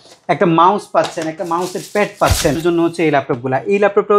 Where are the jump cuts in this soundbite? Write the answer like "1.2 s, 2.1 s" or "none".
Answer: 2.6 s